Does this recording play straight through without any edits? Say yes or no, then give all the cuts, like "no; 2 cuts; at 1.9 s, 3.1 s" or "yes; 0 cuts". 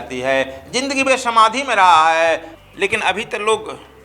no; 1 cut; at 2.5 s